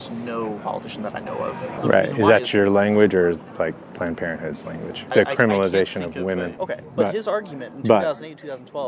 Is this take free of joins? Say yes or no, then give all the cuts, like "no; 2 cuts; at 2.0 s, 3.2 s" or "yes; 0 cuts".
no; 3 cuts; at 1.8 s, 5.1 s, 6.5 s